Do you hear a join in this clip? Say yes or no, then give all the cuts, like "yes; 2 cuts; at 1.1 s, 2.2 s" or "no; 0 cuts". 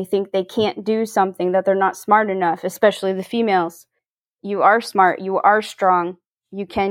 no; 0 cuts